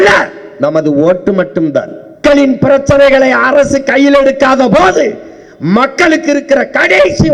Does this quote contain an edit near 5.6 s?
no; 1 cut; at 2.2 s

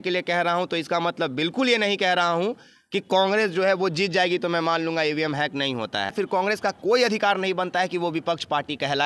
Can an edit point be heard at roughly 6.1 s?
yes; 1 cut; at 6.1 s

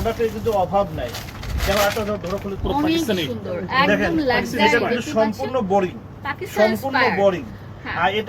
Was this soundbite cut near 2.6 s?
yes; 1 cut; at 2.6 s

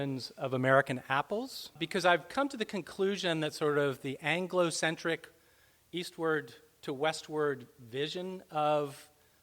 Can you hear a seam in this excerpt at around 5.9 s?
no; 1 cut; at 1.8 s

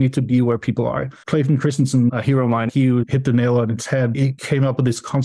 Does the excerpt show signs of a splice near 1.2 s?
yes; 3 cuts; at 1.2 s, 2.6 s, 4.3 s

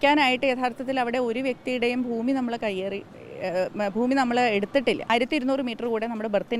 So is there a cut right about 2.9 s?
no; 1 cut; at 5.1 s

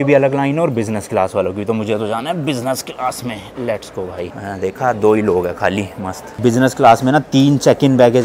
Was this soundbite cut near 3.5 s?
no; 0 cuts

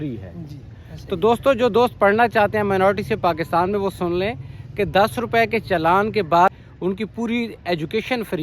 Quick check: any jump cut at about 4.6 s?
no; 1 cut; at 6.5 s

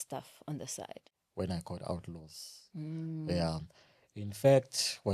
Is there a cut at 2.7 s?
no; 1 cut; at 1.1 s

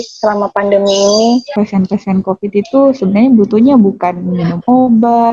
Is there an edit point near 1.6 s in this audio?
yes; 1 cut; at 1.6 s

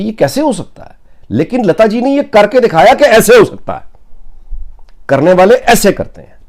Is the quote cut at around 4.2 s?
no; 0 cuts

